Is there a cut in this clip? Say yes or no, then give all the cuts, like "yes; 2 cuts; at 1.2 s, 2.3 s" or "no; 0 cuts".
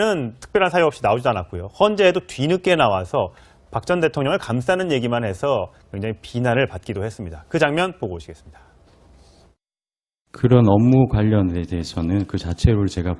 no; 0 cuts